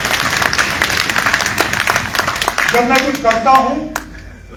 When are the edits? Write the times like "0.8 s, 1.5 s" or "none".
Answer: none